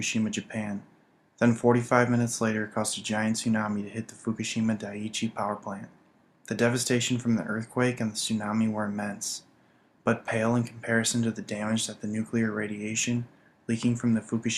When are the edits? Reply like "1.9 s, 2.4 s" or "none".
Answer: 9.5 s